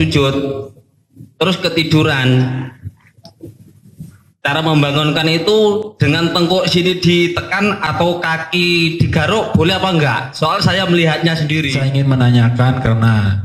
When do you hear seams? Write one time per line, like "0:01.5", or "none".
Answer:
0:11.8